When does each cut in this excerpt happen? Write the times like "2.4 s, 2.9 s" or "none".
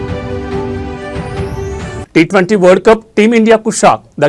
2.0 s